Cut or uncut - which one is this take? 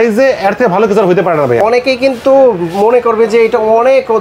uncut